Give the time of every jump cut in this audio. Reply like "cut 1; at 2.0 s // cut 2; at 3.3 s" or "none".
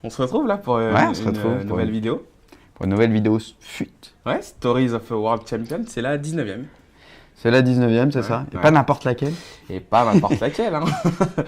cut 1; at 9.4 s